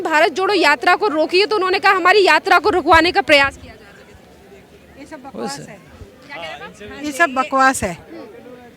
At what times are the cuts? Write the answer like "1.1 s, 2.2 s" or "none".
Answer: none